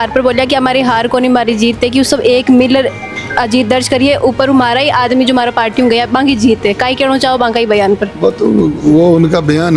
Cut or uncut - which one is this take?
uncut